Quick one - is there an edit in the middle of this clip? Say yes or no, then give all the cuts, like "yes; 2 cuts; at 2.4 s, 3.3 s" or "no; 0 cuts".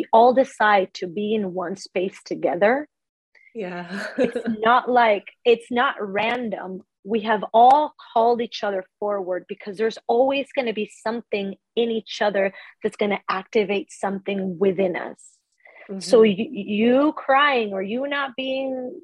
no; 0 cuts